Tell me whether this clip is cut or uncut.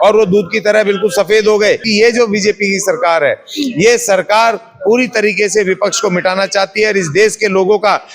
cut